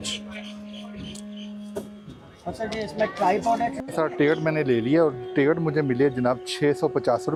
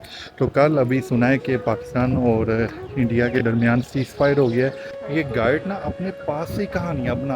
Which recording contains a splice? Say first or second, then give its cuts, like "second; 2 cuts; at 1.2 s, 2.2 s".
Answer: second; 1 cut; at 4.9 s